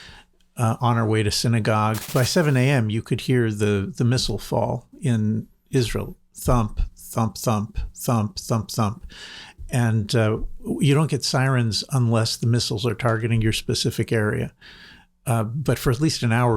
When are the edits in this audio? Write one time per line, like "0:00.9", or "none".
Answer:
0:02.0